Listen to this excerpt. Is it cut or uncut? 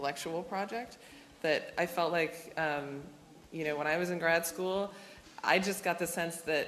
uncut